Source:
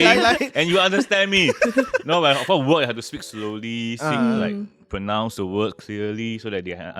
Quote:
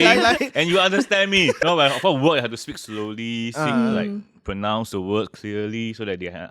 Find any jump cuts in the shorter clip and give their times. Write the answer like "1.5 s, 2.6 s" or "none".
1.6 s